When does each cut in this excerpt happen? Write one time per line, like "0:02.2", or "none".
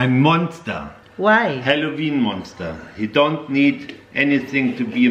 none